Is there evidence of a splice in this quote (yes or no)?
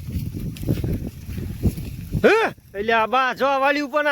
no